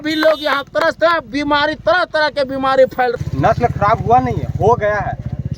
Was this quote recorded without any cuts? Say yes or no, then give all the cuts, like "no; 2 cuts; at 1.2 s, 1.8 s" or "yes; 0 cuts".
no; 1 cut; at 3.2 s